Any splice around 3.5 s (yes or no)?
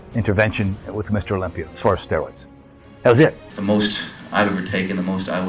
yes